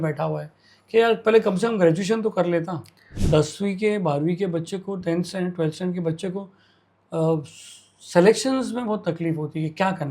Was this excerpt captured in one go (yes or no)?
no